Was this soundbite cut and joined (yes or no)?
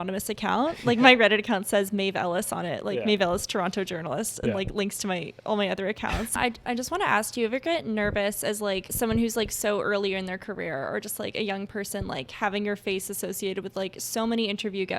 yes